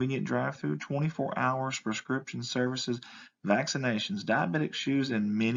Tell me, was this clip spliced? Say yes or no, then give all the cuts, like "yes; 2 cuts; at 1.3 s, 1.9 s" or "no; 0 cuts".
no; 0 cuts